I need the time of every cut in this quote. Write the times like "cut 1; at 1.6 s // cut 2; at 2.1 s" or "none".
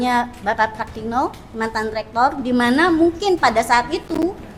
none

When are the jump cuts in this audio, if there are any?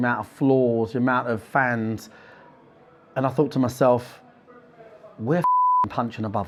none

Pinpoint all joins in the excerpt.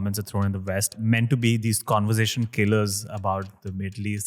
cut 1; at 1.0 s

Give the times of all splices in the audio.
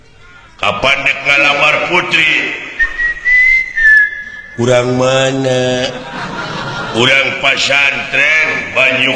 none

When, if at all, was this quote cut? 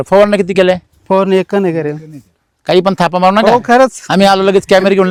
none

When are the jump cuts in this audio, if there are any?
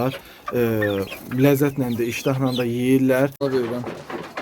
cut 1; at 3.5 s

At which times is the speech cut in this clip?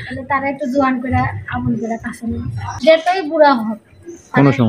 cut 1; at 2.8 s

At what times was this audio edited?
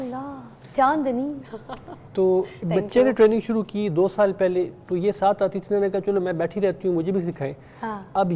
none

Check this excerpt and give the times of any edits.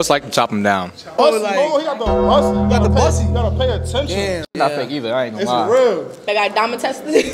cut 1; at 1.2 s

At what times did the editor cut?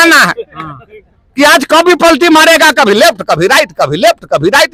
none

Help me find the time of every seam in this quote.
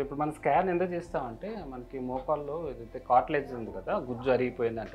none

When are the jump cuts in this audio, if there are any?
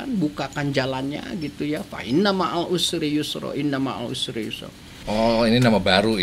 cut 1; at 5.0 s

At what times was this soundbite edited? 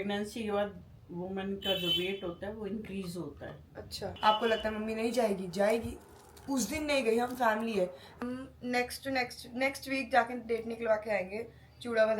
cut 1; at 4.0 s // cut 2; at 8.2 s

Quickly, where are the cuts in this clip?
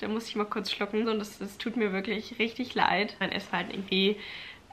cut 1; at 1.1 s // cut 2; at 3.2 s

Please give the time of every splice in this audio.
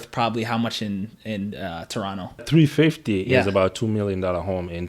cut 1; at 2.5 s

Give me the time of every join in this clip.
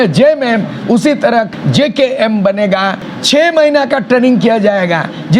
cut 1; at 1.5 s // cut 2; at 3.0 s

